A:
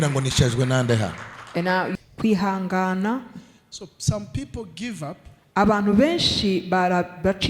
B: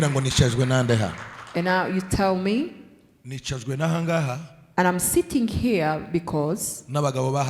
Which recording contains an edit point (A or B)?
A